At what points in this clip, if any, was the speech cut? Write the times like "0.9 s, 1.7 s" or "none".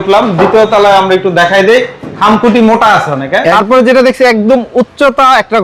3.5 s